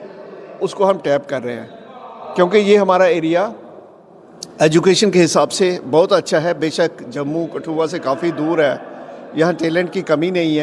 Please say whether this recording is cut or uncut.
uncut